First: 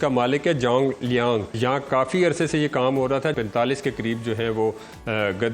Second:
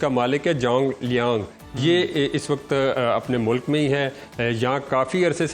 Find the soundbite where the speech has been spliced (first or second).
first